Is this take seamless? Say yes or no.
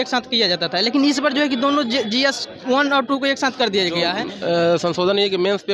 no